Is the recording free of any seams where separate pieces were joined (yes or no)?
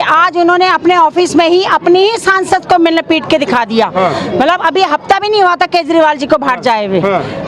yes